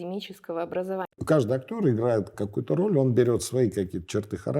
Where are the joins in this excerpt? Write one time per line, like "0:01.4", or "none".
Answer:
0:01.2
0:02.3